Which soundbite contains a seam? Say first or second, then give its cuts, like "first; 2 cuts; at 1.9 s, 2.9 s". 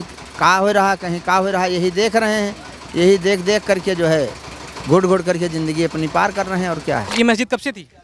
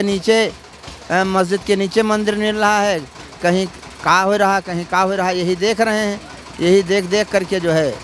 first; 1 cut; at 7.1 s